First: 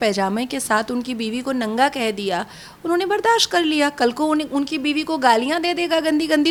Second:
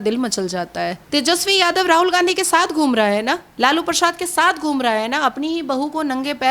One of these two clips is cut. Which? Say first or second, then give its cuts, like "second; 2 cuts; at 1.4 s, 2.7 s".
second; 2 cuts; at 1.0 s, 3.5 s